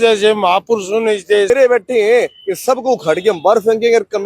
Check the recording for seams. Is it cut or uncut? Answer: cut